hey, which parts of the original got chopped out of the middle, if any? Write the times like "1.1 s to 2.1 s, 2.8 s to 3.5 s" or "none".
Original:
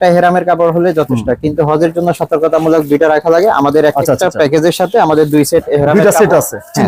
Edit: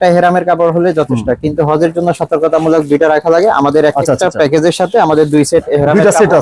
none